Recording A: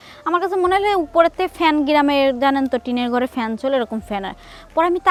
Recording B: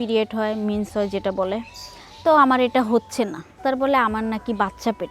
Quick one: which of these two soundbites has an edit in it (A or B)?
B